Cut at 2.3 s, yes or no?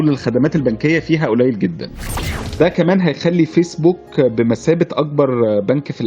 yes